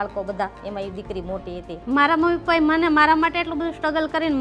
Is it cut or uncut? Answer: cut